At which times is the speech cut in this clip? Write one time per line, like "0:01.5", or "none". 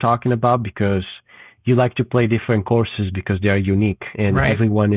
none

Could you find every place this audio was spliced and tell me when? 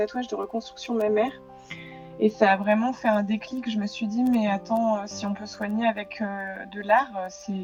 none

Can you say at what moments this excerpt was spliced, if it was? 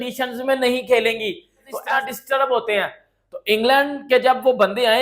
0:01.7

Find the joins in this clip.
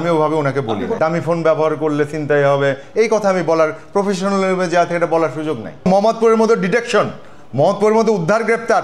0:00.9
0:05.8

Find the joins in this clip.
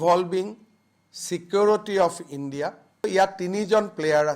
0:03.0

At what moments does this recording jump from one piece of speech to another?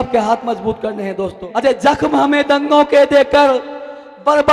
0:01.4

